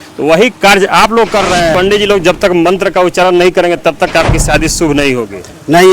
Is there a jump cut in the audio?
yes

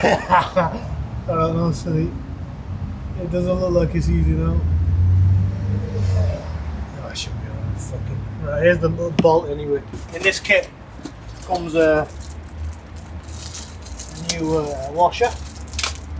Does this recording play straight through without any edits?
yes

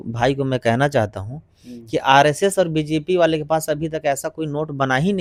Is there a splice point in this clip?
no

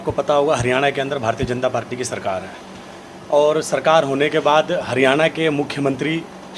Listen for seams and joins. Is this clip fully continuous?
yes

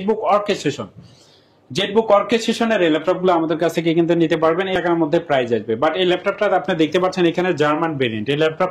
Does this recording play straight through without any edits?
no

